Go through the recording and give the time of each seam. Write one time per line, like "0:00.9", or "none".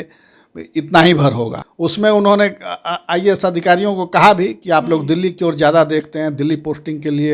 0:01.6